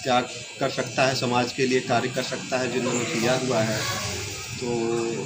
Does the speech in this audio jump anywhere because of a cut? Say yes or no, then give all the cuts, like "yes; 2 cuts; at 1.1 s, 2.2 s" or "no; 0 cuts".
no; 0 cuts